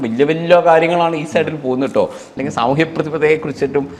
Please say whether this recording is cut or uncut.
cut